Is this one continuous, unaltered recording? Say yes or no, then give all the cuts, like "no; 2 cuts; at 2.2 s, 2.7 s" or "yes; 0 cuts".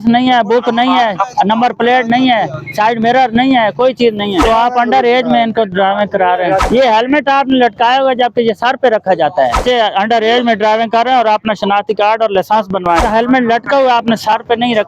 no; 4 cuts; at 4.4 s, 6.6 s, 9.6 s, 13.0 s